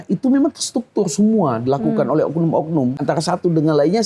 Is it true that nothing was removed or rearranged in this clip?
no; 1 cut; at 3.0 s

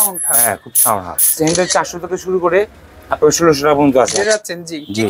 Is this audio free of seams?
no; 2 cuts; at 1.4 s, 4.2 s

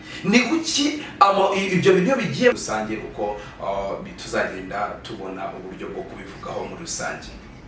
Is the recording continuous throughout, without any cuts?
no; 1 cut; at 2.6 s

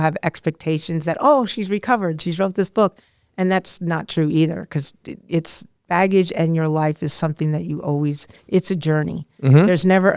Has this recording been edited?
no; 0 cuts

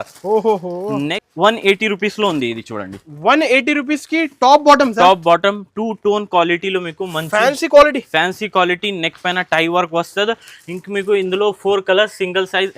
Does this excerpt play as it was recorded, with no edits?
no; 1 cut; at 1.2 s

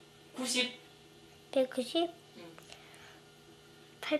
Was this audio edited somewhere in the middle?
no; 0 cuts

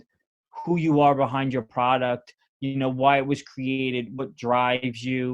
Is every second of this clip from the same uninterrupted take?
yes; 0 cuts

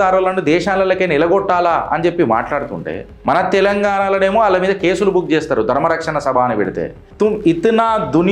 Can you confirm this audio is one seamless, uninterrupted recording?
no; 2 cuts; at 3.1 s, 7.0 s

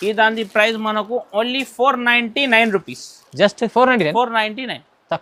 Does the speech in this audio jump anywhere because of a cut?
no; 0 cuts

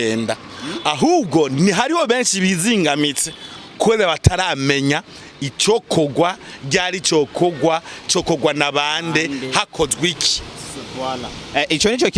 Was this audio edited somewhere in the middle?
no; 0 cuts

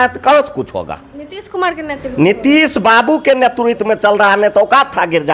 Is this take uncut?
yes; 0 cuts

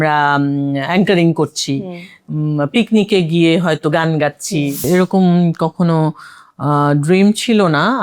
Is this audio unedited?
no; 1 cut; at 4.9 s

